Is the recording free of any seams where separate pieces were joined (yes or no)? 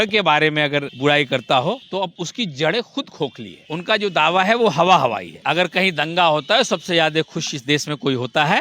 no